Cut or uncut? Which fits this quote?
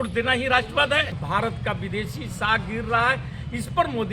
cut